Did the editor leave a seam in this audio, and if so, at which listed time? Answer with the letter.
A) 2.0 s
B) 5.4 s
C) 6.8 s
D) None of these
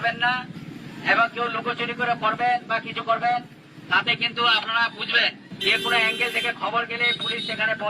B